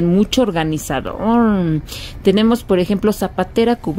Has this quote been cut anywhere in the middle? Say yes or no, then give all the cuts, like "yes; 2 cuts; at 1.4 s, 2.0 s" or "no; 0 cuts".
no; 0 cuts